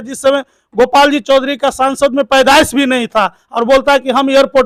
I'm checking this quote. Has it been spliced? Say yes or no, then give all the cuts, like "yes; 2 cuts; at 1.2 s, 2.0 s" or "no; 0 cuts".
no; 0 cuts